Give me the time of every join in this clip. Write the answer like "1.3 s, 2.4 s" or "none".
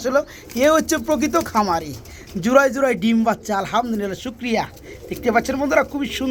none